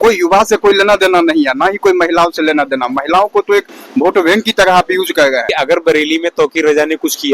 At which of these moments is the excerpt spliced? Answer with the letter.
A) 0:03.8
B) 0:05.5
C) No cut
B